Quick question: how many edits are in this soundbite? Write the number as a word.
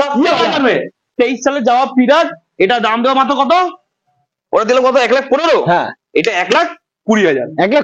one